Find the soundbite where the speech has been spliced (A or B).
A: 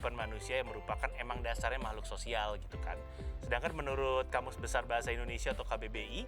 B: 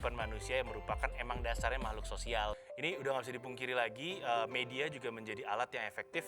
B